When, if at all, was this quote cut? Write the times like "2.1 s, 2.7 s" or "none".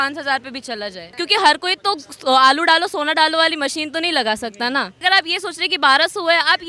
1.1 s, 5.0 s